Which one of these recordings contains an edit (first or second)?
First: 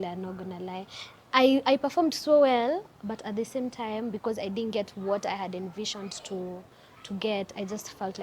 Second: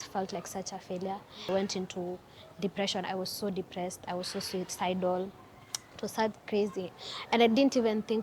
second